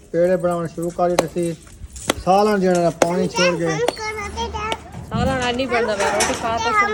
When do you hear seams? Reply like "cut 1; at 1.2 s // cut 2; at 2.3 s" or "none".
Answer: none